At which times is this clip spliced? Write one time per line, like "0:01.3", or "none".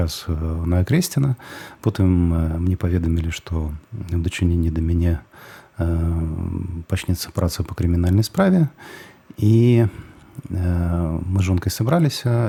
none